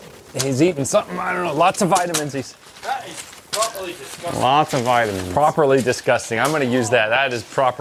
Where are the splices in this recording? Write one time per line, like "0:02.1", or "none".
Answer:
none